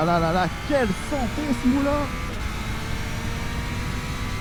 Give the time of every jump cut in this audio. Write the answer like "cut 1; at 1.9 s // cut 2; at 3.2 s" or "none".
none